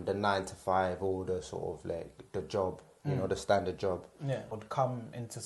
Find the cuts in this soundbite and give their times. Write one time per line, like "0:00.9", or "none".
0:04.5